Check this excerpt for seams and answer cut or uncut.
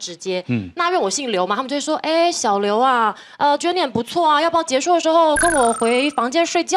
uncut